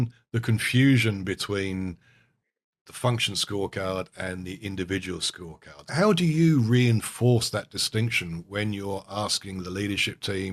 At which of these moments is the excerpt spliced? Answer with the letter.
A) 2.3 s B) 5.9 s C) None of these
B